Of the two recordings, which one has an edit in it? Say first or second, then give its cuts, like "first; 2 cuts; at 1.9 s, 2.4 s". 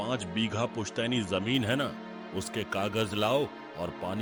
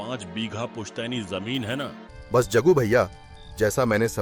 second; 1 cut; at 2.1 s